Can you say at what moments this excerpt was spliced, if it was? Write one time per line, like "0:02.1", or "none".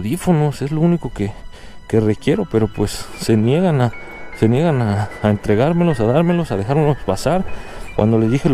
0:07.6